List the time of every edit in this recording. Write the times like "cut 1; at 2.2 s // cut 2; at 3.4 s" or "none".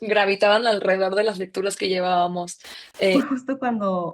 cut 1; at 3.1 s